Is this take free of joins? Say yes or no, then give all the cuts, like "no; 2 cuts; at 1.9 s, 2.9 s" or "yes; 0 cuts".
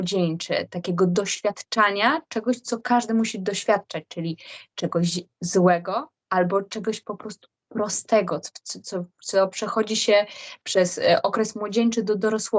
yes; 0 cuts